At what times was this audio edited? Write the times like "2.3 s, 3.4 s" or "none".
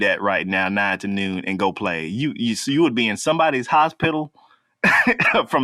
none

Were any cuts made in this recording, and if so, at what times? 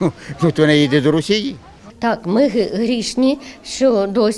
1.8 s

